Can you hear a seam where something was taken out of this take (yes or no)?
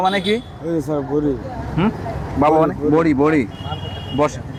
no